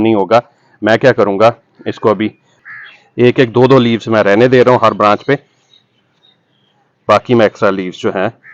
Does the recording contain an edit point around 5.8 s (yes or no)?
no